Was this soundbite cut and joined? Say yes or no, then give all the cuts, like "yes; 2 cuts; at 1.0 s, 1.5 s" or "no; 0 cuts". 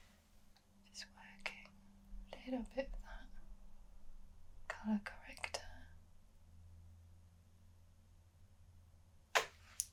no; 0 cuts